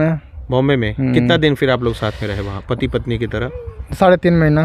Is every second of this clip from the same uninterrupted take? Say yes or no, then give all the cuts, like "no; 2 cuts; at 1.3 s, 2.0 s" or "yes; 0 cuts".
yes; 0 cuts